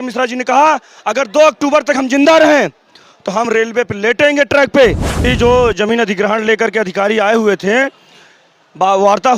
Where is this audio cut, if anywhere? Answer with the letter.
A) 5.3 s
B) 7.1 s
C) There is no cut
A